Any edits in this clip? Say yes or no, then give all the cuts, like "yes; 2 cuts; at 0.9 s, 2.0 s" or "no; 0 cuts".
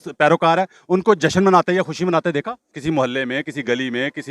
yes; 1 cut; at 2.7 s